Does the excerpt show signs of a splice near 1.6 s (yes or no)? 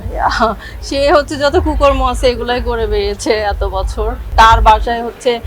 no